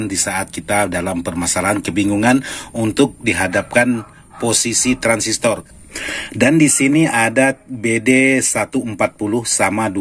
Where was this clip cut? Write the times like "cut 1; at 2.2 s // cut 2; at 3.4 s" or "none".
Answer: cut 1; at 5.7 s